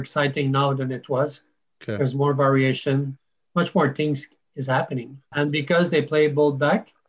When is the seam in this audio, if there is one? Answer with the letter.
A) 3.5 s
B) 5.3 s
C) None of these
B